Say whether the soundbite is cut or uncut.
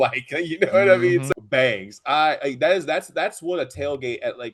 cut